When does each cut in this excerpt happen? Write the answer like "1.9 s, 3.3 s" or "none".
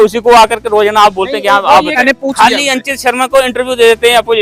2.0 s